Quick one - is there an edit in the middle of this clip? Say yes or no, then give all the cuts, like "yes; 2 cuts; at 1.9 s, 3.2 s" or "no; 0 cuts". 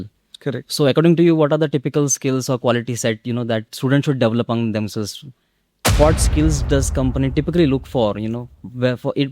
yes; 1 cut; at 5.8 s